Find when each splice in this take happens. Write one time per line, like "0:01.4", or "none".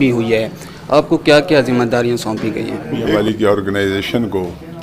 0:03.1